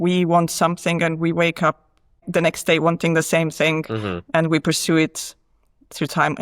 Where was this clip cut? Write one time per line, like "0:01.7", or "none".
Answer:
0:02.3